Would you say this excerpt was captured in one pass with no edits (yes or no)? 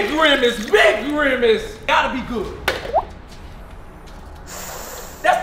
no